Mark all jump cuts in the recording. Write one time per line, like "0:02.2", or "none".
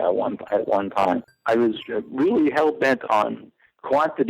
0:01.3